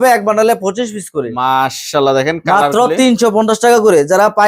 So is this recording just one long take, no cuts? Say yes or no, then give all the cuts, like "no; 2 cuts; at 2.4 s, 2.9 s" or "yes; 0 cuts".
yes; 0 cuts